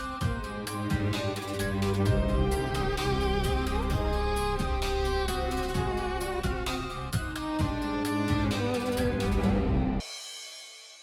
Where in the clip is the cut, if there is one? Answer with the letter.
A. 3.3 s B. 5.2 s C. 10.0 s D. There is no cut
C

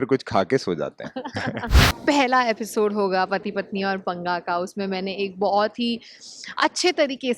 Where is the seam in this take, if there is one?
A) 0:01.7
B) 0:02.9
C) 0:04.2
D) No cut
A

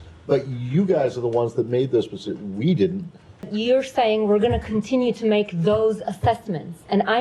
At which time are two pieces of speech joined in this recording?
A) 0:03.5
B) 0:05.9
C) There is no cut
A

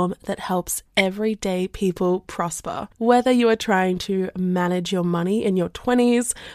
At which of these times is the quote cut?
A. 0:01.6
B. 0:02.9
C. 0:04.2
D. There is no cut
B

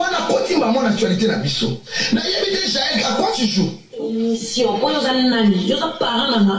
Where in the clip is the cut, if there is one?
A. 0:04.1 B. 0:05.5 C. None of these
A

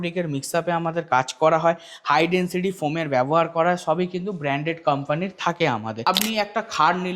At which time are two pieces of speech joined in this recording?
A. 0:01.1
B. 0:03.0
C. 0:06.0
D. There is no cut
C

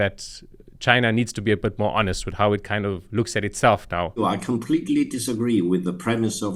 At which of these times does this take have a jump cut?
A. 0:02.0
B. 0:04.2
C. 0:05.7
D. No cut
B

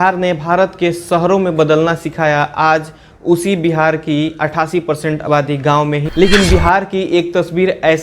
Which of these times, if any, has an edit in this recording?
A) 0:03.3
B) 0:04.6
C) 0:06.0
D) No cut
C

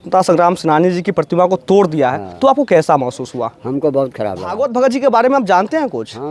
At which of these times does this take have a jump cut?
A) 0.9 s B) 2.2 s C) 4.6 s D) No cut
C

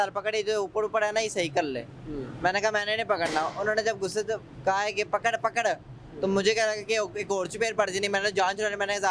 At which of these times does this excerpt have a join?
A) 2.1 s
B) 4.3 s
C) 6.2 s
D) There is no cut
D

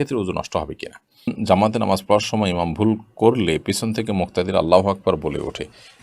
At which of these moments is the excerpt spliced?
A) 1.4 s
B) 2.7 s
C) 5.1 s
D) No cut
A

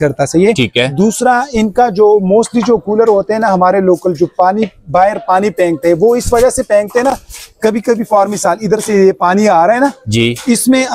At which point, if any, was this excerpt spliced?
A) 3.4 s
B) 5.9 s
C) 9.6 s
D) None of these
D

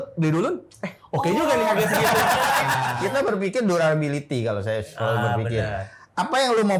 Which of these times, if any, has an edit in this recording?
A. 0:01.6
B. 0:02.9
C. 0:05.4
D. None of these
B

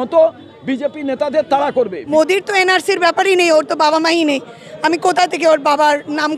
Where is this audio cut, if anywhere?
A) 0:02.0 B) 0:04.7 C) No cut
A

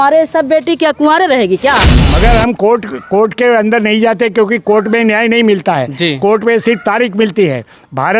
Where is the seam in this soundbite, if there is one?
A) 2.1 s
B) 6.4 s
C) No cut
A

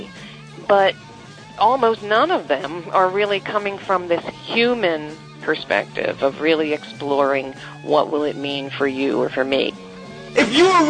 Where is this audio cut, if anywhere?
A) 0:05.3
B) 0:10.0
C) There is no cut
B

